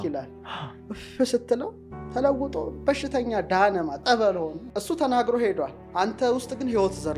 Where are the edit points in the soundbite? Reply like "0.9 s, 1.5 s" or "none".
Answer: 4.7 s